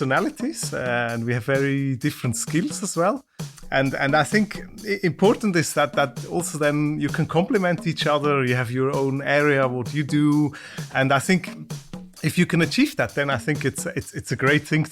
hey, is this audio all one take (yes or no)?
no